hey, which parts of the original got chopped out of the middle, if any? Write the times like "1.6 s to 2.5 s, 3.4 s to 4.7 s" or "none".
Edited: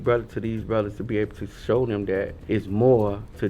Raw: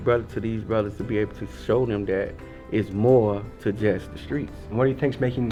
2.4 s to 2.6 s